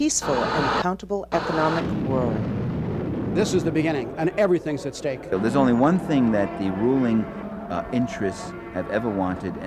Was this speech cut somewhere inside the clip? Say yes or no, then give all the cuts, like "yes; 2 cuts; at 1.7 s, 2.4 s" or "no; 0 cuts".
yes; 1 cut; at 2.3 s